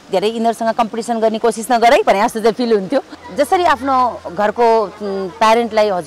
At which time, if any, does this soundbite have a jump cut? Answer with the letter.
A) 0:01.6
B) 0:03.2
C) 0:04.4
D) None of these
B